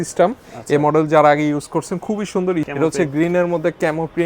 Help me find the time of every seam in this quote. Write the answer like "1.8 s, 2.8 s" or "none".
2.7 s